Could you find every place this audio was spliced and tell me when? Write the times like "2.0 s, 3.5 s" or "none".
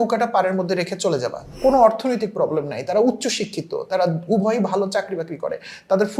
1.4 s